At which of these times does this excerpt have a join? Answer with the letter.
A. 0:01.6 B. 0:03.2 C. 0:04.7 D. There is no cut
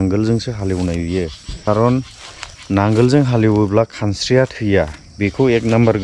A